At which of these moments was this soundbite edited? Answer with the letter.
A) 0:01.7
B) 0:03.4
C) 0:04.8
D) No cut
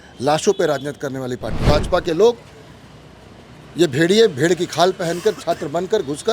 A